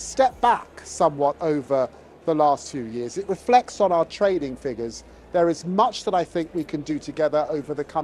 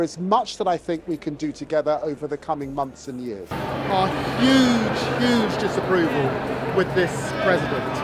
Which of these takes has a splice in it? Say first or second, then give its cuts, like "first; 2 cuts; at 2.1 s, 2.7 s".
second; 1 cut; at 3.5 s